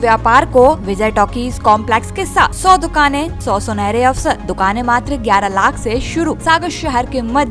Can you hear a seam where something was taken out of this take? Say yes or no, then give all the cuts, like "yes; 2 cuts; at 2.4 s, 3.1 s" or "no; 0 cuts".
yes; 5 cuts; at 0.9 s, 2.6 s, 3.3 s, 4.5 s, 6.4 s